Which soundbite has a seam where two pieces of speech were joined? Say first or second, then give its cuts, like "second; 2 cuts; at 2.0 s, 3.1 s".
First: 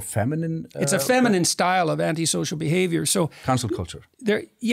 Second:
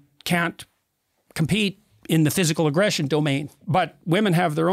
second; 1 cut; at 3.5 s